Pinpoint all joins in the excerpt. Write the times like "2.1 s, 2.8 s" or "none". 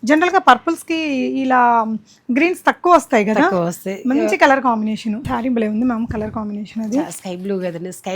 5.2 s